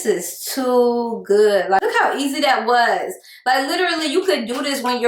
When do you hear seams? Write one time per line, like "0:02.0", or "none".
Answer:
0:01.8